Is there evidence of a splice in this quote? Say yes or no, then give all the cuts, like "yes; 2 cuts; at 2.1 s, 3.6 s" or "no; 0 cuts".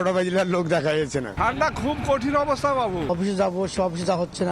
yes; 2 cuts; at 1.3 s, 3.1 s